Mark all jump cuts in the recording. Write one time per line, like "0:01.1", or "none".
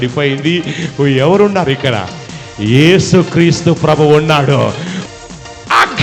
0:04.9